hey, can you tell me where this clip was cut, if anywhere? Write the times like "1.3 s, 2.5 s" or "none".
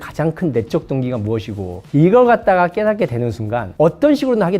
none